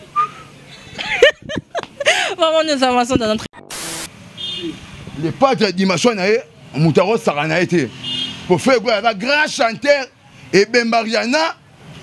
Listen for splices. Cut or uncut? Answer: cut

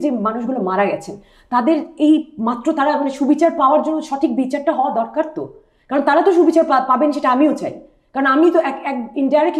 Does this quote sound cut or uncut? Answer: uncut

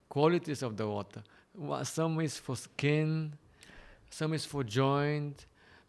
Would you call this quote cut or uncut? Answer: uncut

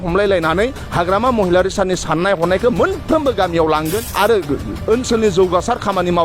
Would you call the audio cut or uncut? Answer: cut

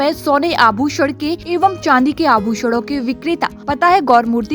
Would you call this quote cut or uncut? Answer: cut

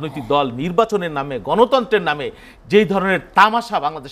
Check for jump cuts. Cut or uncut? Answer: uncut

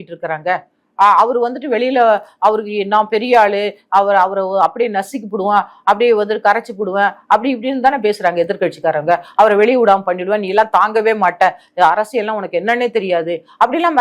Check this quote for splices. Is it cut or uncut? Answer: uncut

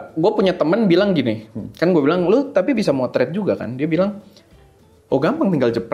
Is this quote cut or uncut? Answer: uncut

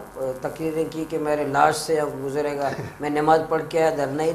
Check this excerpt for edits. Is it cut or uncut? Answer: uncut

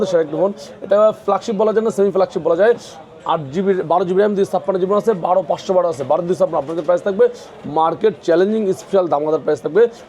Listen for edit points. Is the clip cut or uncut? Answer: uncut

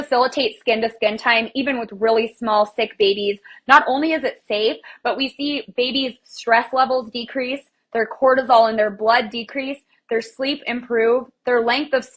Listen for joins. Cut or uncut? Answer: uncut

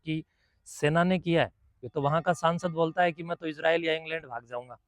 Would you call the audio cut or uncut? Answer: cut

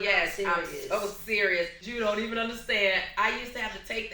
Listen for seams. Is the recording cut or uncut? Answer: cut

